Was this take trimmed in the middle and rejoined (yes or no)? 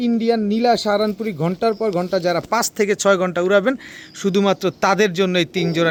no